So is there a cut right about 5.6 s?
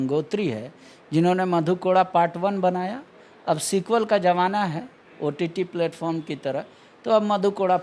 no; 0 cuts

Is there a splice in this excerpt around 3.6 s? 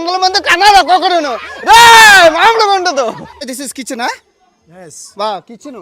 yes; 1 cut; at 3.6 s

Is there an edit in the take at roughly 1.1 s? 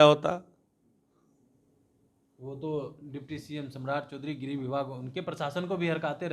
no; 0 cuts

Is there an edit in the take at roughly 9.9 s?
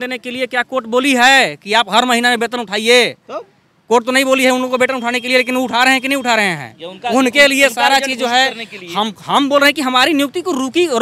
no; 0 cuts

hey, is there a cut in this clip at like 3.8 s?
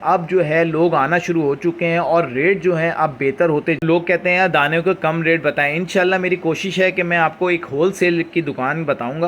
yes; 1 cut; at 3.8 s

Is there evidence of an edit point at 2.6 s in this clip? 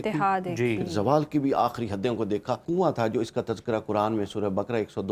yes; 1 cut; at 2.6 s

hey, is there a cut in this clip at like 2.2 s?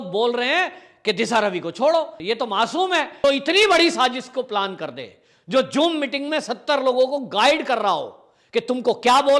yes; 2 cuts; at 2.2 s, 3.1 s

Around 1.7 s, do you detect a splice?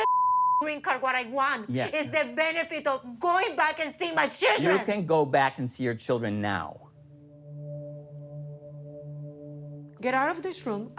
no; 2 cuts; at 7.4 s, 9.9 s

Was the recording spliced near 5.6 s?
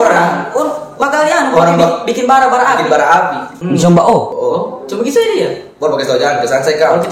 no; 2 cuts; at 3.5 s, 4.3 s

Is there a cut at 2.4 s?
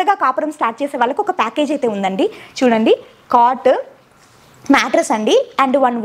no; 0 cuts

